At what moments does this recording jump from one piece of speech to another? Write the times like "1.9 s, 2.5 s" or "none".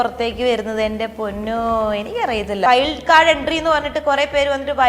2.7 s

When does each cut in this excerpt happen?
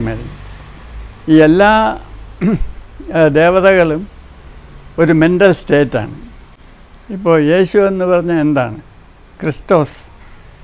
none

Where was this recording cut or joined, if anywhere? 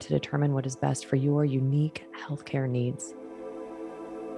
3.1 s

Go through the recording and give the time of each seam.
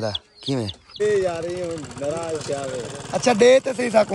1.0 s

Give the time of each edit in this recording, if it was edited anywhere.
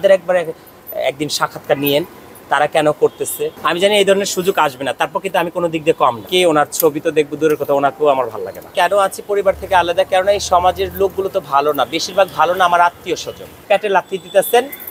3.5 s, 6.3 s, 8.7 s, 13.6 s

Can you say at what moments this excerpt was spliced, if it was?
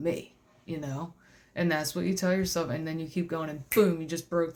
none

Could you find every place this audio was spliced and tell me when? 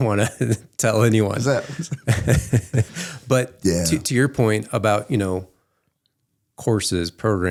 none

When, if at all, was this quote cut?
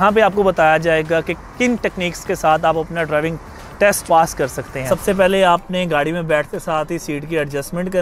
4.8 s

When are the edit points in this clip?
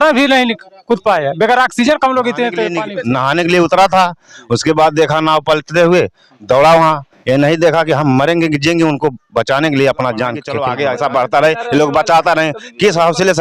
2.9 s, 10.5 s

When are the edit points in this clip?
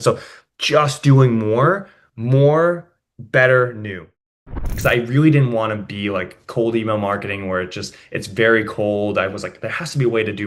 4.3 s

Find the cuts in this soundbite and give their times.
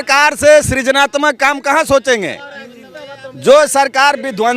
none

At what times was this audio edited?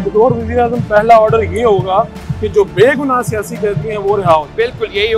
none

